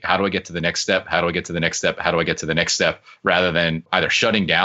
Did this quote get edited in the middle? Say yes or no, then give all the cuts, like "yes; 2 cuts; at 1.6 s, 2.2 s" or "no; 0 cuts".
no; 0 cuts